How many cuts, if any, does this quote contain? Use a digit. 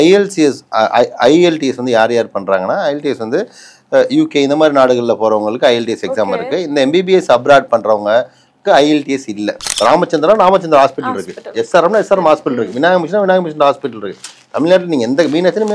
1